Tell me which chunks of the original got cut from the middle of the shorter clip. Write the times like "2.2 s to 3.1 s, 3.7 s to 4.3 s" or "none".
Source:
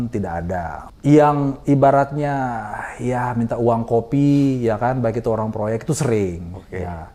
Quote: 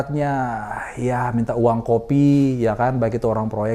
none